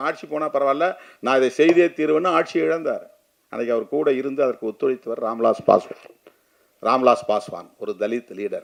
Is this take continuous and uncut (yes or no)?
yes